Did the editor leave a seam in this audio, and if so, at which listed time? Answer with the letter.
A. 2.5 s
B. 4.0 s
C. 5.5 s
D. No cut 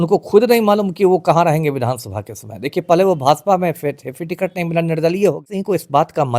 C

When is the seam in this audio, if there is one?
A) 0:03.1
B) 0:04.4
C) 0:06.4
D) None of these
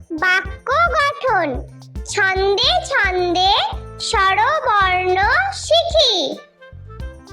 C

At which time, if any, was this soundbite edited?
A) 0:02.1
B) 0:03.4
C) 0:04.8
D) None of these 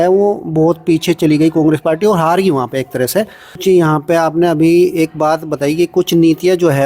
B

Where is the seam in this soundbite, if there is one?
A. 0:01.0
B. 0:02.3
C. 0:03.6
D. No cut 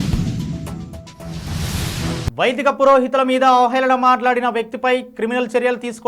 B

